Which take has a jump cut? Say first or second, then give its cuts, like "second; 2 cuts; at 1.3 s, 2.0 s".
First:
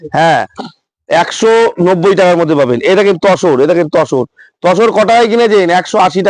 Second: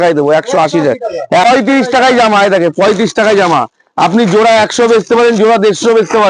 second; 1 cut; at 1.5 s